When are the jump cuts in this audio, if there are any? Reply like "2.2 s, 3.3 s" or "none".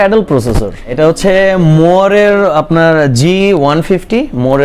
0.9 s